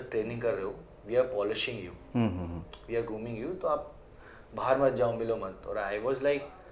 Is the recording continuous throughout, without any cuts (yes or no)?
yes